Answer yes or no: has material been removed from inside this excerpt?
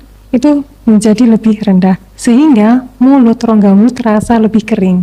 no